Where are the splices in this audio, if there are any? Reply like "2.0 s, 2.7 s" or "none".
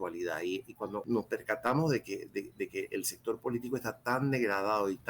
1.0 s